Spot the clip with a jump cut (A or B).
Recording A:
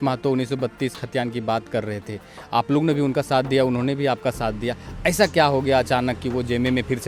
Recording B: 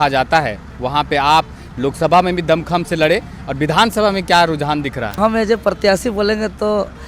B